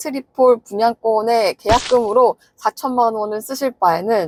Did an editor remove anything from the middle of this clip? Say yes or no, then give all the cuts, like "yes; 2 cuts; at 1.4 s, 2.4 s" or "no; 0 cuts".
no; 0 cuts